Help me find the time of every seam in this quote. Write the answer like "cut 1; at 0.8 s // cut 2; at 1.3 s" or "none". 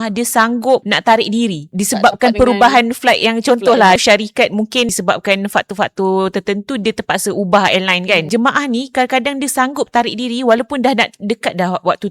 cut 1; at 0.9 s // cut 2; at 1.6 s // cut 3; at 4.0 s // cut 4; at 4.9 s // cut 5; at 8.3 s